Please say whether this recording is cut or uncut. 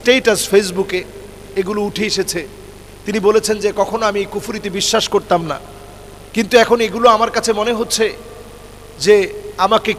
uncut